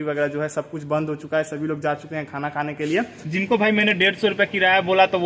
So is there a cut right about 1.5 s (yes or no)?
no